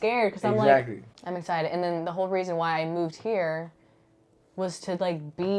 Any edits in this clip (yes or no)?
no